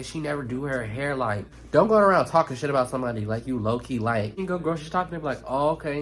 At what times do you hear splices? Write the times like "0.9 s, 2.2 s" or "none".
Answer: 1.5 s, 4.4 s